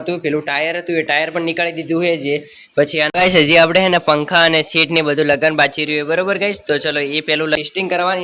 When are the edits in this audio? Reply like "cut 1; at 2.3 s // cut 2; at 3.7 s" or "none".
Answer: cut 1; at 2.7 s // cut 2; at 7.6 s